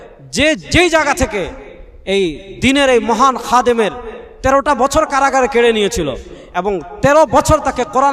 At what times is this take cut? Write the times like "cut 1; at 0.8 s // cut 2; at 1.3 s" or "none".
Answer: none